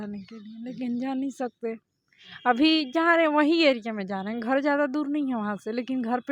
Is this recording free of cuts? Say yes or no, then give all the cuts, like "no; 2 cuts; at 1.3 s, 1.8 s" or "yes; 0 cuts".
yes; 0 cuts